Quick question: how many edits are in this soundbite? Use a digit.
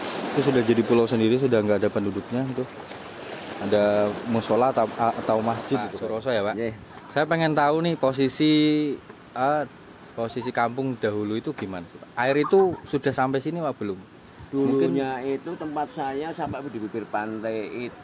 1